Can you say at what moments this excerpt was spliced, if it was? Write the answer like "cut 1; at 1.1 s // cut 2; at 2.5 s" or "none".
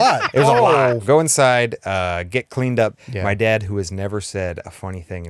cut 1; at 1.0 s // cut 2; at 3.0 s